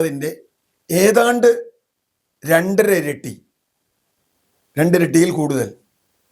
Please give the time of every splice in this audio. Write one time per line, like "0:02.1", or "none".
none